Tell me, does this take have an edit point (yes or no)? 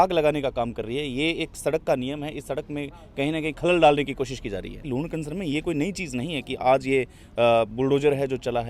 yes